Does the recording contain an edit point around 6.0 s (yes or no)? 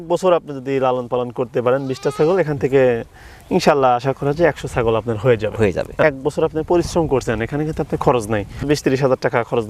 yes